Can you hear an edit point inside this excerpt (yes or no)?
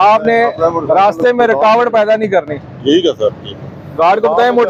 no